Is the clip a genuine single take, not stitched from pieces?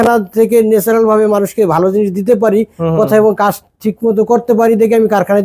yes; 0 cuts

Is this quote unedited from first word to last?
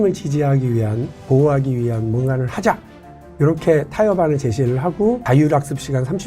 no; 1 cut; at 5.2 s

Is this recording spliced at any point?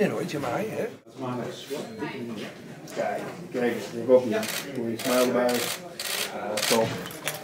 no; 0 cuts

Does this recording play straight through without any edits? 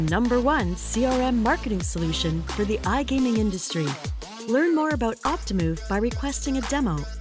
yes; 0 cuts

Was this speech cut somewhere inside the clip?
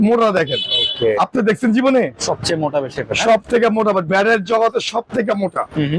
no; 0 cuts

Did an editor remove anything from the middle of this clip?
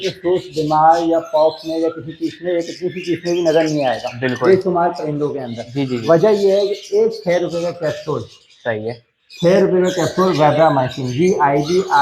no; 0 cuts

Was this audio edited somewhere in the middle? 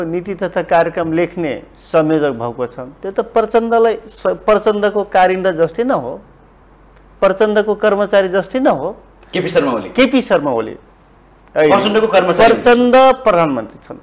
no; 0 cuts

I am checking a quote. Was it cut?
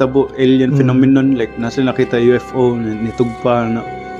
no; 0 cuts

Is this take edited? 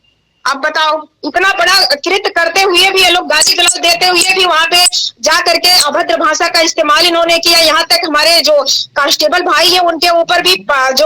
yes; 1 cut; at 1.1 s

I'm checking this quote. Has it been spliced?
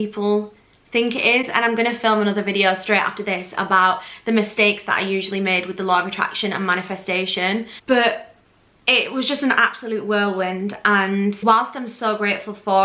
no; 0 cuts

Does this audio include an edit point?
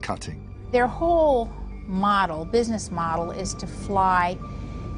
no; 0 cuts

